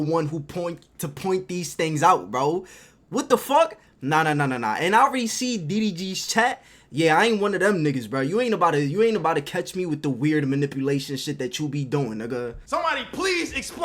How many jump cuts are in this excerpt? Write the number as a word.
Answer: one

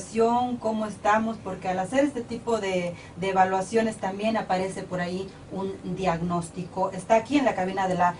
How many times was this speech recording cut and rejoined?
one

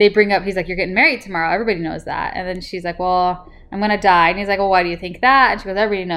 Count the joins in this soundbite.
zero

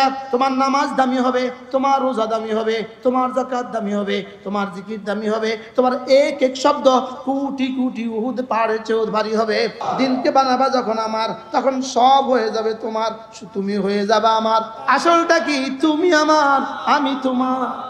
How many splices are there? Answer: two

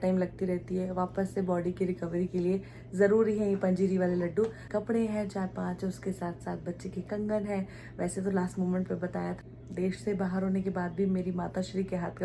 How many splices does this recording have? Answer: two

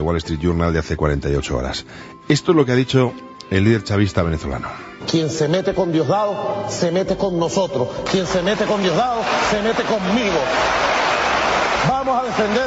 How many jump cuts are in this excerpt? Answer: one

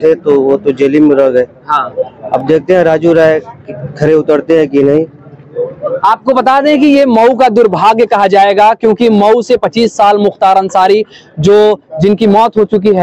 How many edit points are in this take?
zero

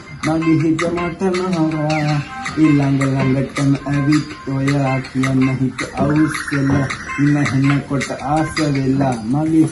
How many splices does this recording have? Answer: zero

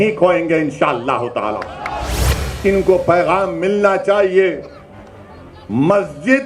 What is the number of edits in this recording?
one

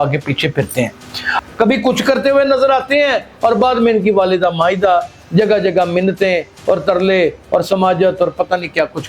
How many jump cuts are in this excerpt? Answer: one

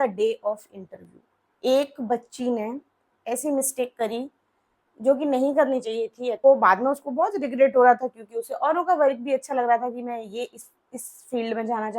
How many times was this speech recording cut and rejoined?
one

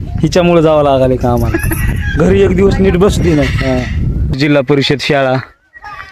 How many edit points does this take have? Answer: one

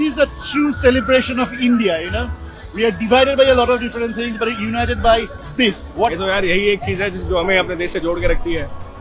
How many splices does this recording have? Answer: one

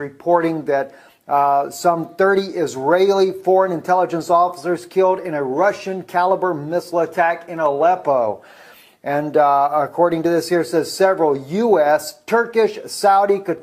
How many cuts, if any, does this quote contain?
one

